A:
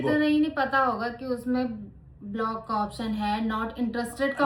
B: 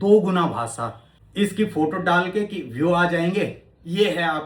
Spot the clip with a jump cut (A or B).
B